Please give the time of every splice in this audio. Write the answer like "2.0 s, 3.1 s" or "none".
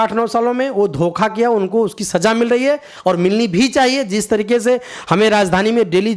none

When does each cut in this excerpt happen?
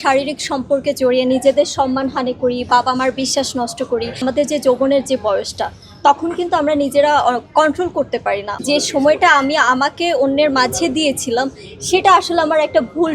4.2 s, 8.5 s

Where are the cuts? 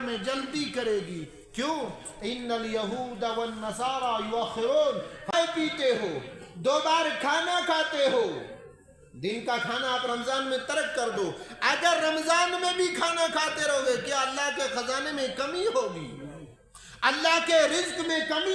5.3 s

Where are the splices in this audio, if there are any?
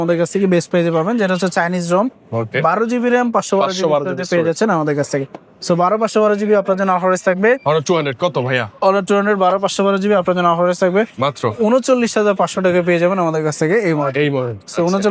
none

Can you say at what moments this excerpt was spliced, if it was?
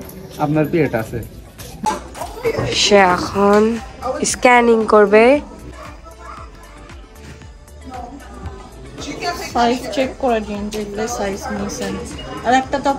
1.9 s

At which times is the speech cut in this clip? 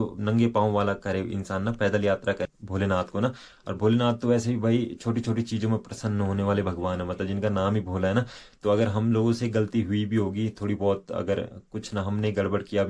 2.4 s

